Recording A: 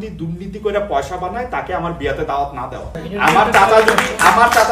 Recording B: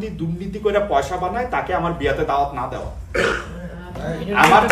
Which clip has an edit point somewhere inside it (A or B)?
A